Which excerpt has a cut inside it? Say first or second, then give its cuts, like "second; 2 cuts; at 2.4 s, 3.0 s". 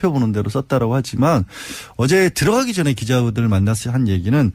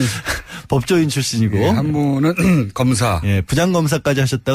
second; 1 cut; at 3.0 s